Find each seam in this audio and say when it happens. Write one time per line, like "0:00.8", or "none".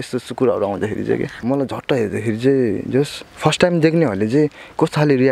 0:01.4